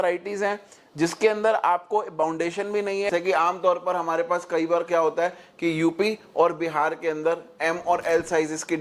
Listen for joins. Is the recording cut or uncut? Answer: cut